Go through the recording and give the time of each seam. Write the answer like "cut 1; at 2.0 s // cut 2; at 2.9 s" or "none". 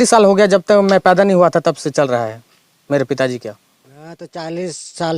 cut 1; at 4.2 s